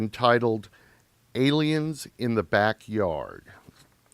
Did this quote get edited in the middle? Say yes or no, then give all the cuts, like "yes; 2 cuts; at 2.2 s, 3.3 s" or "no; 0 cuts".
yes; 1 cut; at 3.0 s